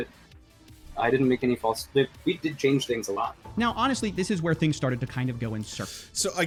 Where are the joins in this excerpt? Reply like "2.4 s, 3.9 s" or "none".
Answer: none

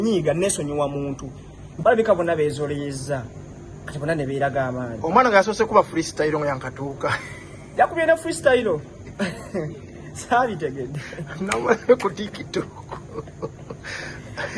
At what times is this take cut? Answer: 1.6 s

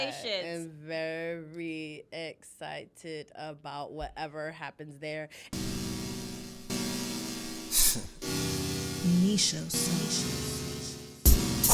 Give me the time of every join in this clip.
5.4 s

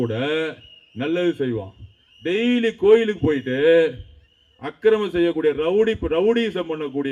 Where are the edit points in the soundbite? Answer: none

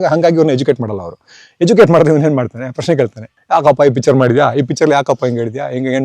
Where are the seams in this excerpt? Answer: 3.3 s

